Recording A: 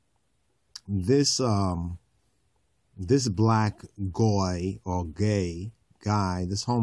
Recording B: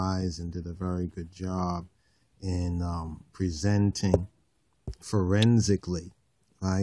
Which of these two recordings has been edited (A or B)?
B